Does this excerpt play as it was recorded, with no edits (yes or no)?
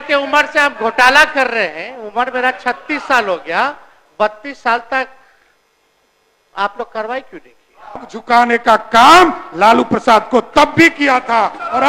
no